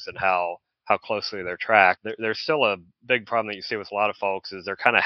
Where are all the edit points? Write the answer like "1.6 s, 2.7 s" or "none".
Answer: 2.1 s